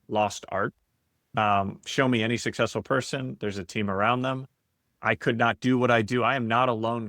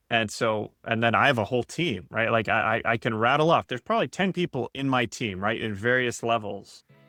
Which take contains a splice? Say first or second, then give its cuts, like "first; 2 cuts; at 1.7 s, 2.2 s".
first; 1 cut; at 1.3 s